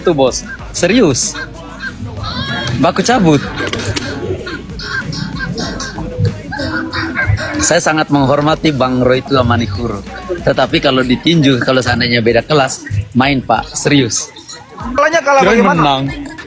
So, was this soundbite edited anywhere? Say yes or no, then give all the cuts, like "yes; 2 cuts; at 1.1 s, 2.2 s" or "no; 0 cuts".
yes; 1 cut; at 15.0 s